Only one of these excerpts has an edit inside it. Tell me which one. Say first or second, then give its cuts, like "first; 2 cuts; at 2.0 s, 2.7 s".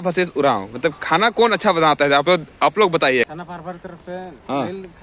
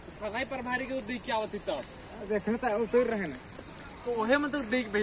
first; 1 cut; at 3.2 s